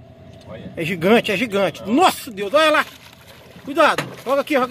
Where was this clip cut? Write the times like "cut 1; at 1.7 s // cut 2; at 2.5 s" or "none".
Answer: none

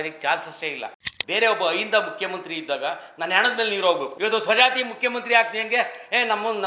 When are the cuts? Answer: cut 1; at 1.1 s // cut 2; at 4.1 s

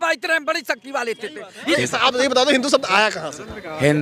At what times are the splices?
cut 1; at 1.6 s

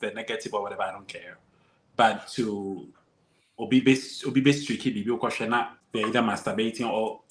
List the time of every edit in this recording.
cut 1; at 5.8 s

